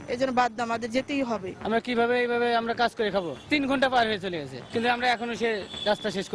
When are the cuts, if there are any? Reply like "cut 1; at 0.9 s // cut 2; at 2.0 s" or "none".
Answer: cut 1; at 1.6 s // cut 2; at 3.5 s // cut 3; at 4.6 s